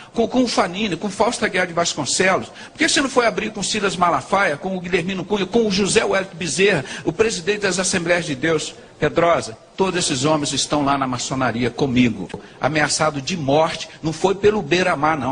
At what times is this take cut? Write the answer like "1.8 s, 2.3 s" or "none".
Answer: 12.4 s